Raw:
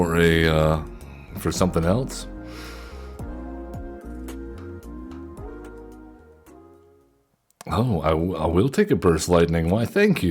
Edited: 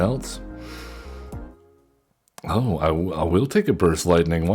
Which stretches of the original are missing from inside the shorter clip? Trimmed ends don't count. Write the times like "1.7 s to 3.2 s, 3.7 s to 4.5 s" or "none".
3.3 s to 6.7 s